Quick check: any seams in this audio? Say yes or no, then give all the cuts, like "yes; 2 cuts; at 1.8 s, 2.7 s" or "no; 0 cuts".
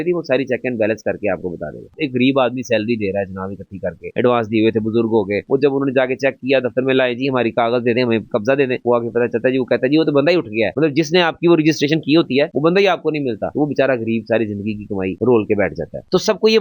yes; 2 cuts; at 1.9 s, 10.7 s